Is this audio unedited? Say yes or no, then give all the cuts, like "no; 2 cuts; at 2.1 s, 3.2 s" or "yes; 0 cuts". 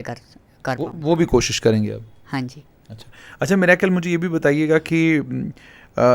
yes; 0 cuts